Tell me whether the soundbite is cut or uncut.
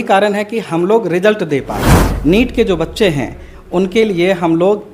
cut